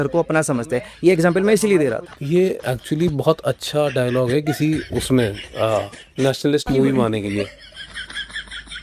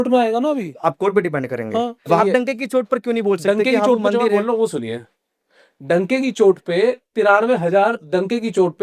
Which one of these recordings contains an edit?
second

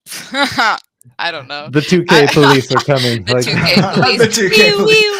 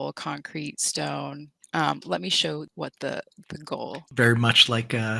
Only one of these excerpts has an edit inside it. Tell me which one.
second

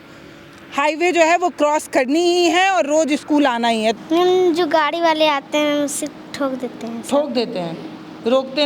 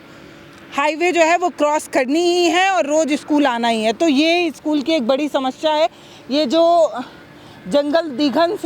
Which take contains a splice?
first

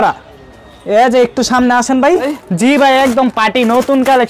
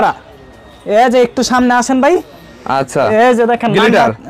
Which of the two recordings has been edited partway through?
first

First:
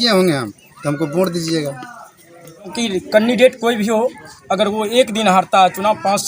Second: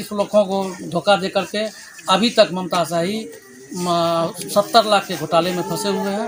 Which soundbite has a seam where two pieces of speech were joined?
first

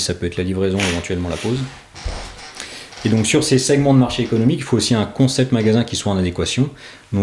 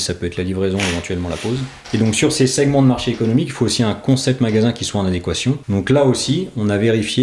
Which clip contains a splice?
second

